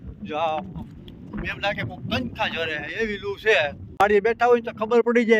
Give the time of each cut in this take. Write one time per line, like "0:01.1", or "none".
0:04.3